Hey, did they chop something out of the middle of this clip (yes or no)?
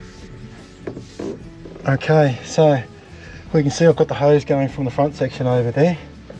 no